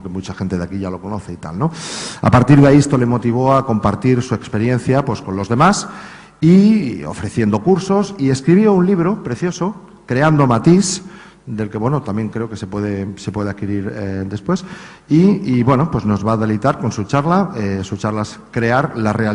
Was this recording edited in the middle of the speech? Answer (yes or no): yes